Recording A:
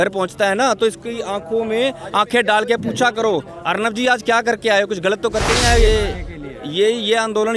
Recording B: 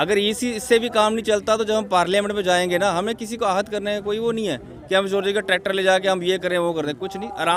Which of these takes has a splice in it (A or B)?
A